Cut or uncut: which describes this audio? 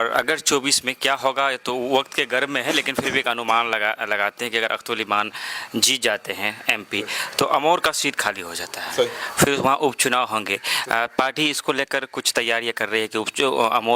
uncut